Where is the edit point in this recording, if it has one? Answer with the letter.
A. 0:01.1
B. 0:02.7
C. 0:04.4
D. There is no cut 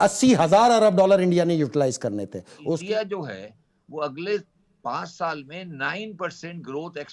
B